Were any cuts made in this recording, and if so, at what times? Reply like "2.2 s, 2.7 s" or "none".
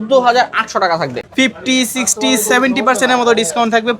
1.2 s